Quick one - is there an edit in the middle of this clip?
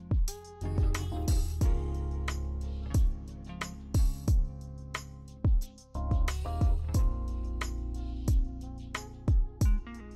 no; 0 cuts

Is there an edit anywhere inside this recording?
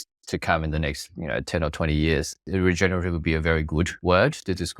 yes; 2 cuts; at 2.4 s, 3.9 s

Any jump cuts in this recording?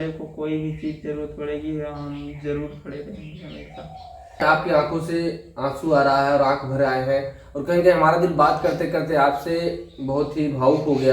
yes; 1 cut; at 4.4 s

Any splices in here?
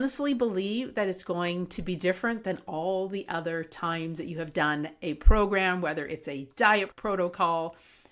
yes; 1 cut; at 6.9 s

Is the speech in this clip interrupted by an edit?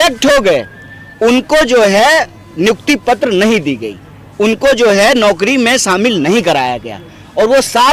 no; 0 cuts

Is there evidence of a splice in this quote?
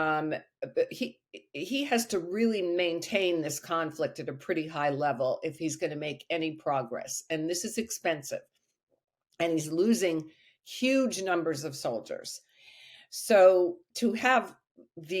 no; 0 cuts

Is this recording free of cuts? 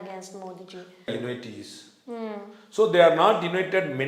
no; 1 cut; at 1.1 s

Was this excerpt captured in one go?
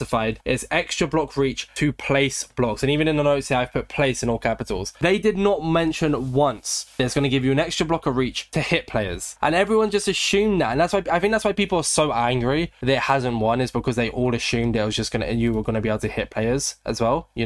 yes; 0 cuts

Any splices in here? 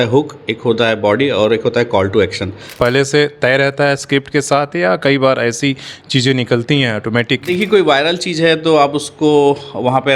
yes; 2 cuts; at 2.7 s, 7.4 s

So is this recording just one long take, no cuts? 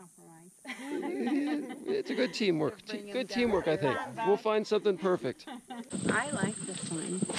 no; 1 cut; at 5.9 s

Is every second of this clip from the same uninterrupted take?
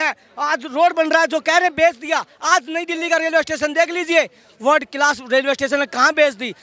yes; 0 cuts

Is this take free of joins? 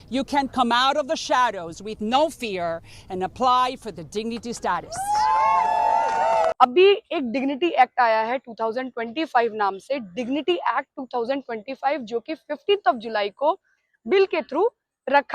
no; 1 cut; at 6.5 s

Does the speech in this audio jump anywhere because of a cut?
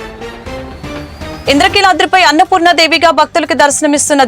no; 0 cuts

